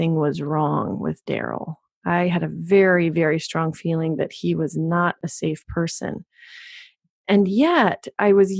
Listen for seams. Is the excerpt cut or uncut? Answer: uncut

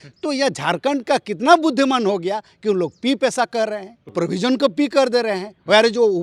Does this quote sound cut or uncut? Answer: cut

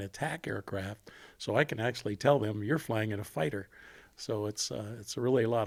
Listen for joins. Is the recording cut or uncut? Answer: uncut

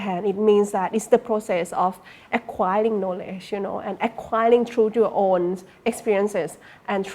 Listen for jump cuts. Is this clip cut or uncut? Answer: uncut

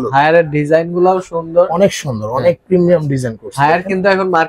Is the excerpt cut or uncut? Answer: uncut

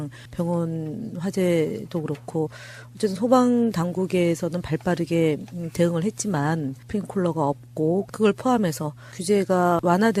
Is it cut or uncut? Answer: cut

